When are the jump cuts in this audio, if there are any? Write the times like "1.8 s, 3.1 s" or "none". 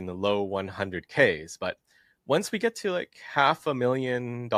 none